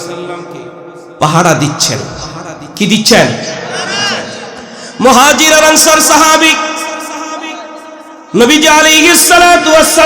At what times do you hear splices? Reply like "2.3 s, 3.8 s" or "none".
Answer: 4.5 s